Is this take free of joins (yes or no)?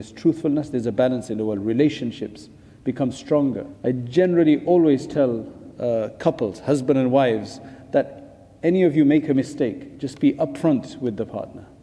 no